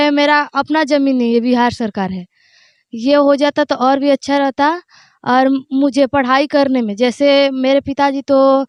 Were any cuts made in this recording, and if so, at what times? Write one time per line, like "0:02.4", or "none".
none